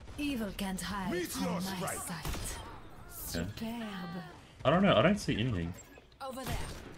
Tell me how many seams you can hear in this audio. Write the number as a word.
zero